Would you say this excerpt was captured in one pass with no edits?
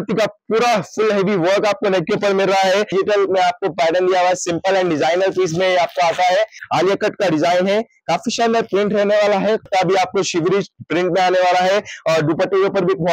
no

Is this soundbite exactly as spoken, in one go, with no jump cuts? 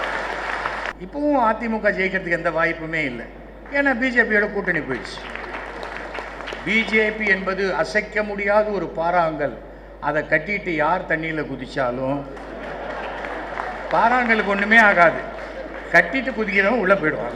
no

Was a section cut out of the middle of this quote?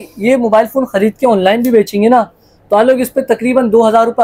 no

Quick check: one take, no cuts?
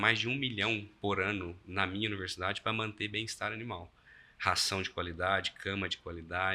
yes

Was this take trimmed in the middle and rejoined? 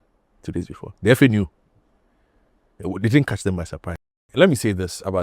yes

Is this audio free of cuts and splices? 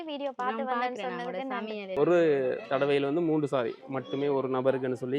no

